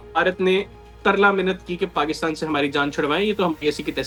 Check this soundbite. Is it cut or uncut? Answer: uncut